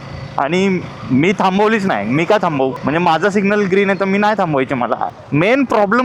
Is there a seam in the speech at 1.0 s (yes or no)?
no